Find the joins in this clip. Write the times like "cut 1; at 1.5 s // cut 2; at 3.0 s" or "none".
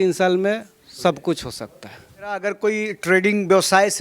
cut 1; at 2.4 s